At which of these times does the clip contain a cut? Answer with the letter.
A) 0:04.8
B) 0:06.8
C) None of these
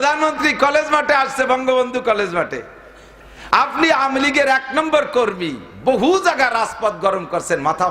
C